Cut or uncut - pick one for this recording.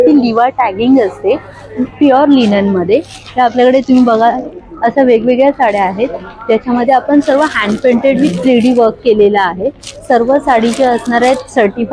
uncut